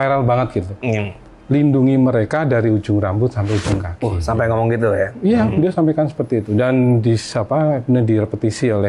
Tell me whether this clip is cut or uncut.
uncut